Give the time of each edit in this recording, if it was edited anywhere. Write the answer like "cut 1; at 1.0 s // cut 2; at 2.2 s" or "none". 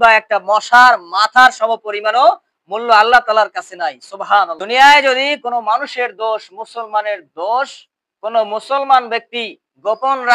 cut 1; at 4.6 s